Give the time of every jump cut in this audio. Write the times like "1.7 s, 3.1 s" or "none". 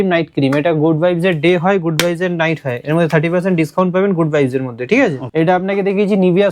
5.2 s